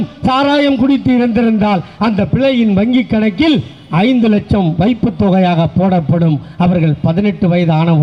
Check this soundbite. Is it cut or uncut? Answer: uncut